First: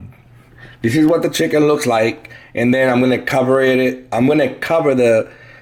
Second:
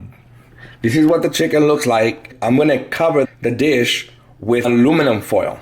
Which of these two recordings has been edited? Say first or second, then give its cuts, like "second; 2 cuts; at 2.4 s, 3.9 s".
second; 3 cuts; at 2.3 s, 3.3 s, 4.6 s